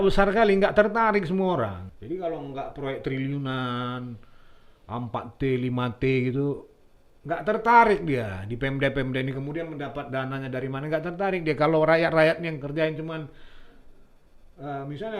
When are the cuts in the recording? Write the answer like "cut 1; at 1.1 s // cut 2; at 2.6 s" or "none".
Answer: cut 1; at 1.9 s